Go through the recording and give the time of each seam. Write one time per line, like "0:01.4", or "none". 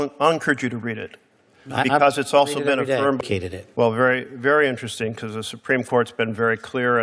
0:03.2